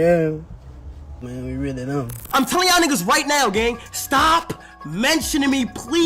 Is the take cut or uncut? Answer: cut